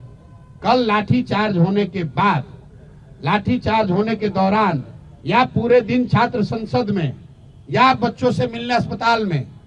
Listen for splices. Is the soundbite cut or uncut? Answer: uncut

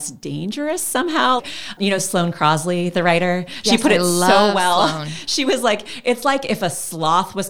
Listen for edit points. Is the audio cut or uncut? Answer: cut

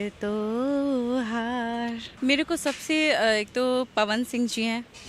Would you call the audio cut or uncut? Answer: cut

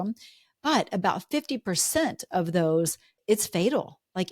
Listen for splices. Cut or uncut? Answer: cut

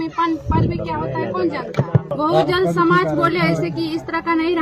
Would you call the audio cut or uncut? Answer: cut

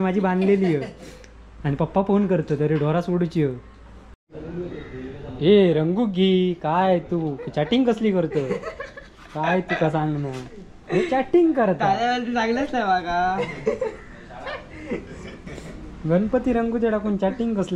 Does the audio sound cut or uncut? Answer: cut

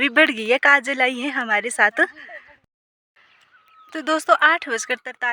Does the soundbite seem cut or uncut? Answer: cut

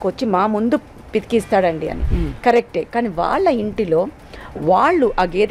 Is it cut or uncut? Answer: uncut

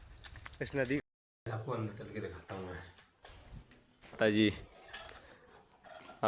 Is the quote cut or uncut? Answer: cut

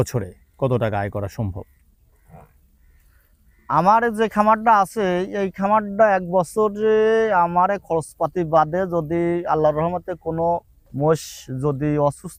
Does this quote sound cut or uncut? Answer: uncut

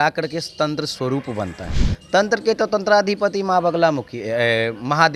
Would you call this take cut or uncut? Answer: uncut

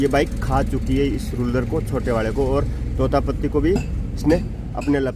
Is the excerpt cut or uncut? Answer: uncut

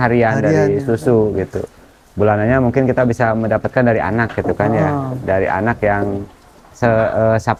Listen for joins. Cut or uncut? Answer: uncut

